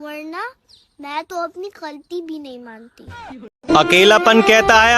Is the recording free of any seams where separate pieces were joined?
no; 1 cut; at 3.5 s

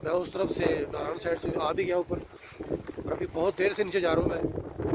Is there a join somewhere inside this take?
no; 0 cuts

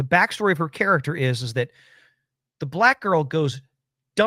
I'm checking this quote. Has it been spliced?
no; 0 cuts

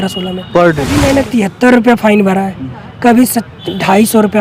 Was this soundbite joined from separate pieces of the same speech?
yes; 1 cut; at 1.0 s

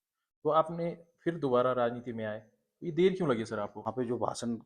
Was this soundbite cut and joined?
yes; 1 cut; at 3.8 s

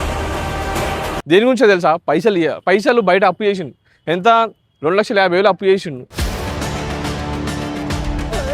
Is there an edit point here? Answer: yes; 1 cut; at 1.1 s

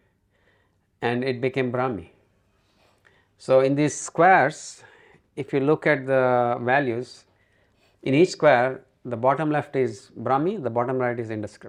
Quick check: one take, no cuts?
yes; 0 cuts

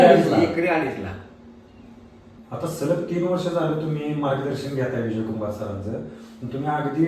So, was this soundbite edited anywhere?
yes; 1 cut; at 2.3 s

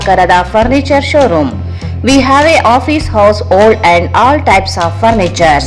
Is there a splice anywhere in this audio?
no; 0 cuts

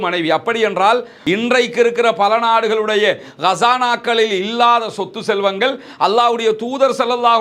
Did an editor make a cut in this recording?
yes; 1 cut; at 1.0 s

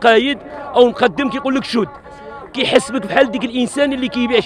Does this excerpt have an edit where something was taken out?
no; 0 cuts

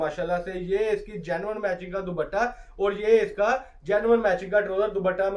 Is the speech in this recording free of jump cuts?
yes; 0 cuts

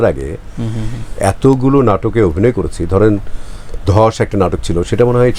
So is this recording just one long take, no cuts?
yes; 0 cuts

